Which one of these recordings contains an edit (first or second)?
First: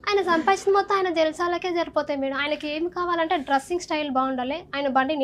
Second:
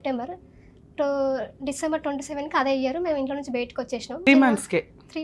second